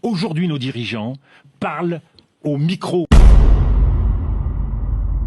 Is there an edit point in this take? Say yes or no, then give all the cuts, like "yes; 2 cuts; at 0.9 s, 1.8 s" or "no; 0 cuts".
yes; 1 cut; at 3.1 s